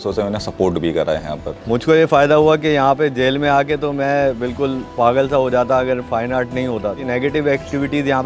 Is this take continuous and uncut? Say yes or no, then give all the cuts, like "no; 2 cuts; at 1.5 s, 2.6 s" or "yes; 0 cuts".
yes; 0 cuts